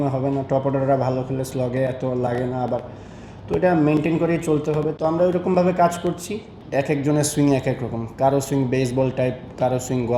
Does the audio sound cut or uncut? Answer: uncut